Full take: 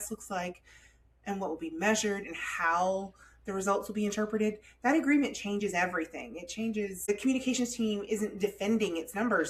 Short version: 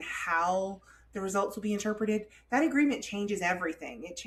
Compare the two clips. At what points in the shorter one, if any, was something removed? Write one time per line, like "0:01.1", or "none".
none